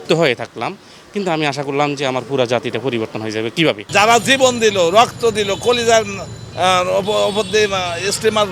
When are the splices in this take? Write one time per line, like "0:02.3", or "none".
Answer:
0:03.9